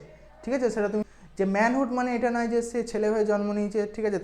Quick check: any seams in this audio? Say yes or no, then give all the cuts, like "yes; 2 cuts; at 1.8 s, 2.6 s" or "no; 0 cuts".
yes; 1 cut; at 1.0 s